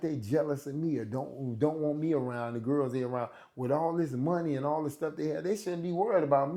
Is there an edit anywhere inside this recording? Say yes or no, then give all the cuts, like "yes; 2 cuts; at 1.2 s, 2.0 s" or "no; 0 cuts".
no; 0 cuts